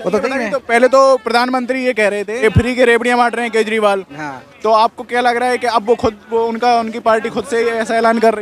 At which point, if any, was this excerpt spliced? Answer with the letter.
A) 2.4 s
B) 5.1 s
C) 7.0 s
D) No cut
A